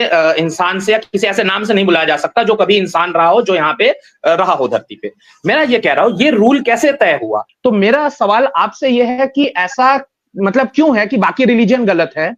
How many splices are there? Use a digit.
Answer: 1